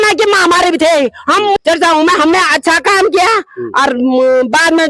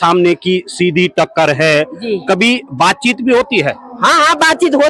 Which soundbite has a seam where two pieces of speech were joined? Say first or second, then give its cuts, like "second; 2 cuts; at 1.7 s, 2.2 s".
first; 1 cut; at 1.6 s